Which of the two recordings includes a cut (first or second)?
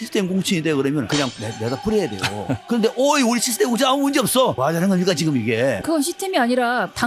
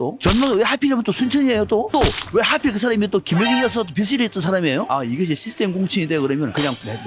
first